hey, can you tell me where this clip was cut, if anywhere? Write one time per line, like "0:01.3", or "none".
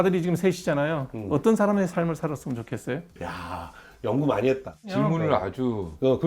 0:03.2
0:04.8